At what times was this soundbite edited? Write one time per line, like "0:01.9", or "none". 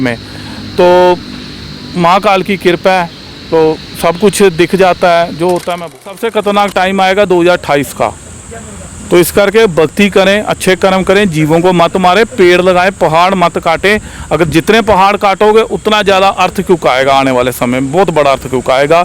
0:05.8